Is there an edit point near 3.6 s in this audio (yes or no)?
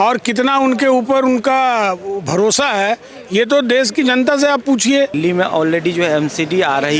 no